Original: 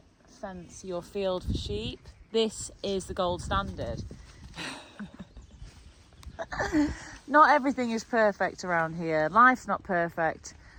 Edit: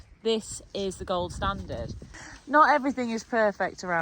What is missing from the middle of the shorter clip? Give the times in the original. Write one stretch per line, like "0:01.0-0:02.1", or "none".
0:04.4-0:07.1